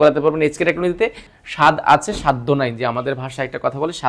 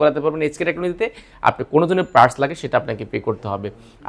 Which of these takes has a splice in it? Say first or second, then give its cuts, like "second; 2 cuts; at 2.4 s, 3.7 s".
first; 1 cut; at 1.3 s